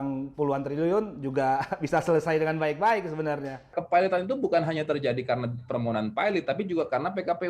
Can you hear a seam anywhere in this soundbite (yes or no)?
yes